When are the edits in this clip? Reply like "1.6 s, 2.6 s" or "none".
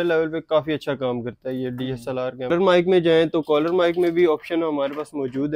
2.5 s

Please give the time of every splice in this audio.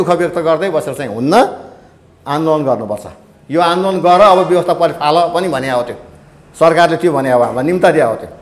none

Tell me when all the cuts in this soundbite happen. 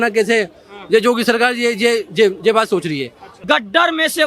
3.3 s

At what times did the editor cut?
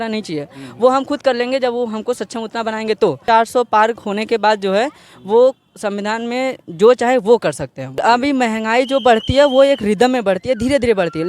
3.2 s, 8.0 s

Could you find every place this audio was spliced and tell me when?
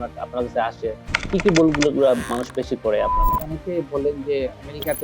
3.6 s

